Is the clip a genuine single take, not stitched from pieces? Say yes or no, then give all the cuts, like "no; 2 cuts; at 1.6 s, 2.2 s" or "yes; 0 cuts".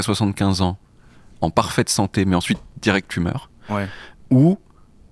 yes; 0 cuts